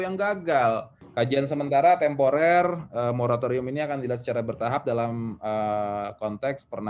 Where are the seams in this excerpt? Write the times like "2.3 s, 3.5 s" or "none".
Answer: 1.0 s